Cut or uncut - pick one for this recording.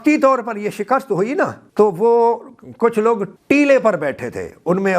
cut